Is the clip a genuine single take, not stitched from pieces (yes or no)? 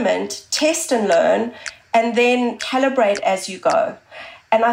no